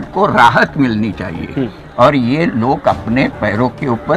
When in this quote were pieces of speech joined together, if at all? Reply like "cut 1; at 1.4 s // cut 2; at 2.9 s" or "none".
none